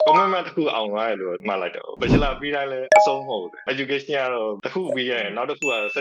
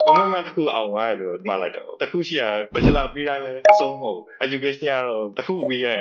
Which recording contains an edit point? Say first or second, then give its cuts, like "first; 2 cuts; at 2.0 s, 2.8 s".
first; 1 cut; at 1.9 s